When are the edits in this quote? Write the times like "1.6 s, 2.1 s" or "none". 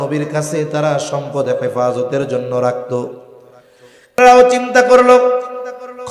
4.2 s